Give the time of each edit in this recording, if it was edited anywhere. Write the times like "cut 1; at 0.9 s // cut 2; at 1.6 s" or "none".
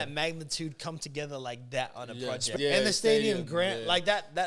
cut 1; at 2.5 s